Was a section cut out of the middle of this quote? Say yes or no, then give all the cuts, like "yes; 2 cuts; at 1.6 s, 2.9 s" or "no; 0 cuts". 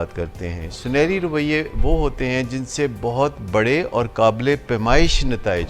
no; 0 cuts